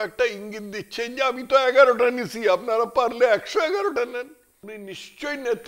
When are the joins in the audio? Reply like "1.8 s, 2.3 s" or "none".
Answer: 4.8 s